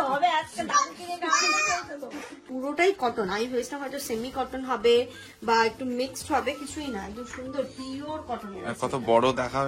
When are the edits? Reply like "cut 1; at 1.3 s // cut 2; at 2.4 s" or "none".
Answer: cut 1; at 2.4 s